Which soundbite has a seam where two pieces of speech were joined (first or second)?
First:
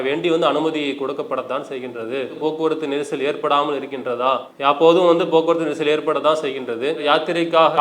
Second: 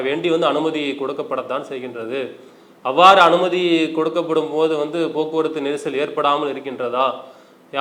first